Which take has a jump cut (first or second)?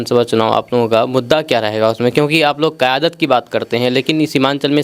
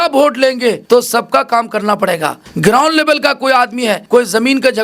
second